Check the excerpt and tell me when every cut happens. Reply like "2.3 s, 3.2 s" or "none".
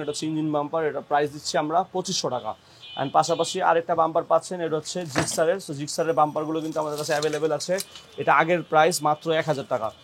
none